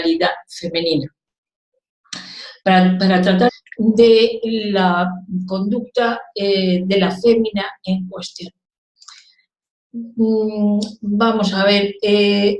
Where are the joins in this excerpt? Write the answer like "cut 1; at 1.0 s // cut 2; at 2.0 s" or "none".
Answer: none